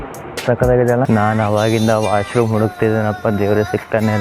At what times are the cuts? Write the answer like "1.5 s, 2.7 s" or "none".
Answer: 1.1 s